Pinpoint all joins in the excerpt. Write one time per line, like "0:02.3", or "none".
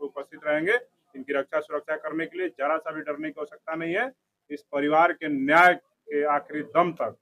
none